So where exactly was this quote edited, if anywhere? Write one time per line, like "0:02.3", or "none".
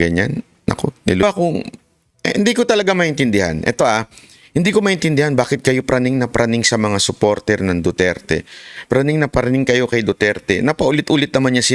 0:01.2